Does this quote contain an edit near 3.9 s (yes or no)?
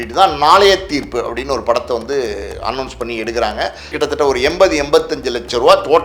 yes